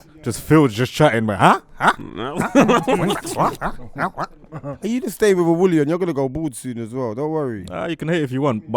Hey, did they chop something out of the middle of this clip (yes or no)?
yes